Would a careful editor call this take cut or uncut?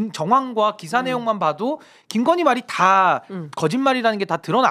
uncut